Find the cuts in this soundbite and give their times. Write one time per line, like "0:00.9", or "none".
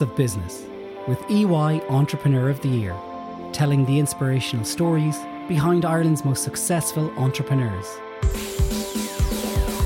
none